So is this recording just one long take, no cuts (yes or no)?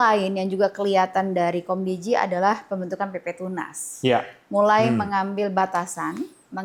yes